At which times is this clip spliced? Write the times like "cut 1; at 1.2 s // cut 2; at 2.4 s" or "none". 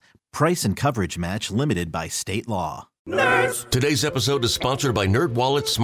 cut 1; at 2.9 s